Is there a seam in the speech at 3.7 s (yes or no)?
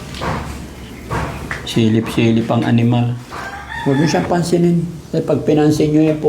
yes